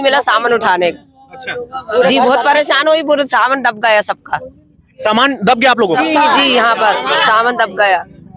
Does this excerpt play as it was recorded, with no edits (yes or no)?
yes